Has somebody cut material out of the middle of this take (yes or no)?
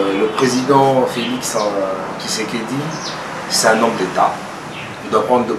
no